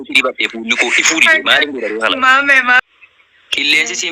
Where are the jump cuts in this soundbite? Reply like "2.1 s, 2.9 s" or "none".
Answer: 2.8 s